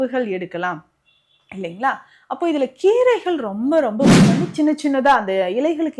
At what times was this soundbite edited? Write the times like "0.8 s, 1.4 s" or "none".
4.2 s